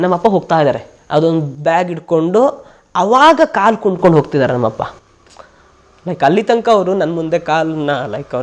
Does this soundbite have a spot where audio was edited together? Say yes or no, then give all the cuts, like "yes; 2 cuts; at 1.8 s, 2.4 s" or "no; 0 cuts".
yes; 1 cut; at 0.9 s